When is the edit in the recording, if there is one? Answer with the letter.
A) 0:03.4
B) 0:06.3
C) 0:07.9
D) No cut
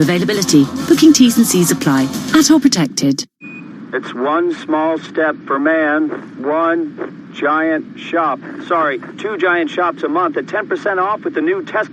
A